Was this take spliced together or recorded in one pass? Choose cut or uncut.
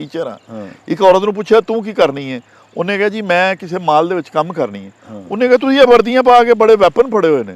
uncut